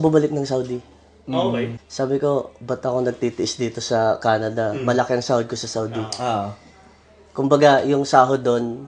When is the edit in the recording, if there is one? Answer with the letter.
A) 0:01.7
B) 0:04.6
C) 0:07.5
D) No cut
A